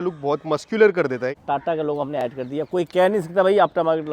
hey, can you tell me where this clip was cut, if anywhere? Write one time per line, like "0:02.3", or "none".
0:01.4